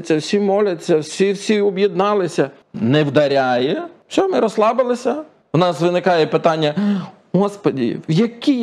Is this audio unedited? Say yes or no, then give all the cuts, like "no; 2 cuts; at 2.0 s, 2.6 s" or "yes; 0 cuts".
no; 3 cuts; at 2.6 s, 3.9 s, 5.3 s